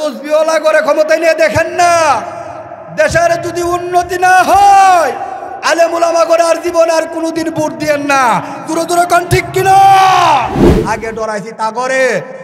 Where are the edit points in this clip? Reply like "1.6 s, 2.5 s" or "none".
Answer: 10.8 s